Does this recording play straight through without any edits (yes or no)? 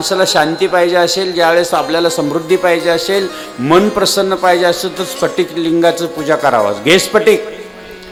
yes